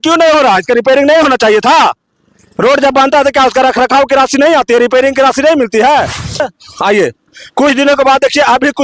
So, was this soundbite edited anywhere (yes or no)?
yes